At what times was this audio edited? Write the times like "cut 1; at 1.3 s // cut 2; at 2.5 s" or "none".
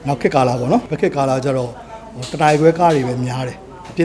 cut 1; at 0.9 s